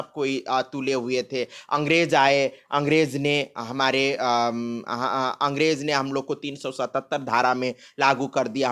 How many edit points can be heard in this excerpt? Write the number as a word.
zero